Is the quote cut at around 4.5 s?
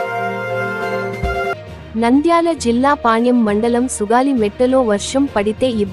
no; 1 cut; at 1.5 s

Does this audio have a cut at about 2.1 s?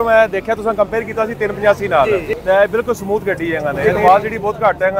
yes; 2 cuts; at 2.1 s, 3.8 s

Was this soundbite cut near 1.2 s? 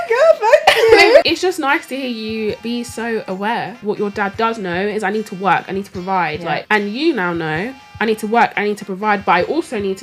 yes; 4 cuts; at 1.2 s, 2.6 s, 3.8 s, 6.6 s

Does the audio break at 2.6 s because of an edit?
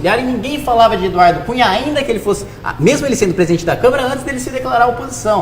yes; 1 cut; at 2.6 s

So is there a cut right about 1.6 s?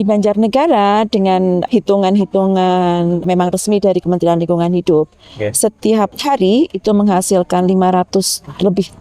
yes; 3 cuts; at 1.6 s, 3.2 s, 6.2 s

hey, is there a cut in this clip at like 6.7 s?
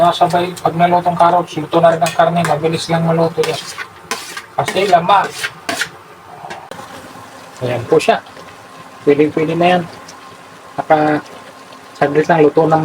yes; 1 cut; at 6.7 s

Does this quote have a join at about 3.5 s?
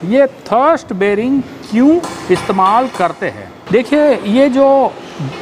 yes; 1 cut; at 3.5 s

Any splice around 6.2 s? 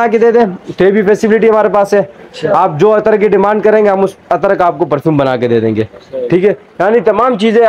no; 0 cuts

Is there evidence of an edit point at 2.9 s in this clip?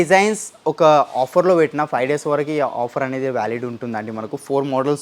no; 0 cuts

